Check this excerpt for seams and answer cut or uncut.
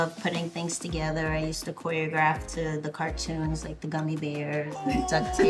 uncut